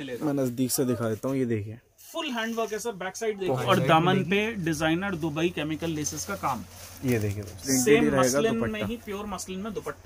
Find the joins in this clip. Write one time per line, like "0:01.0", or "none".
0:03.6
0:07.6